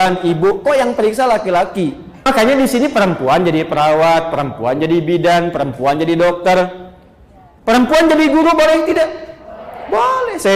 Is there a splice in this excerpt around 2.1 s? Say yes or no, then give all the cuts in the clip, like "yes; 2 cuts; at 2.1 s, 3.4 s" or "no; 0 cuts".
yes; 1 cut; at 2.1 s